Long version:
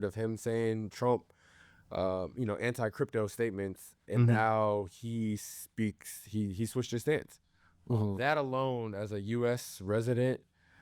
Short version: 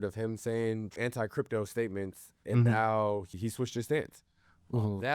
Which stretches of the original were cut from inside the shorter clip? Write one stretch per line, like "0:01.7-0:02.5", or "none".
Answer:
0:01.0-0:02.6
0:05.0-0:06.5